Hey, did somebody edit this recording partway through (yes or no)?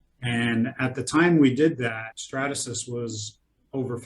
yes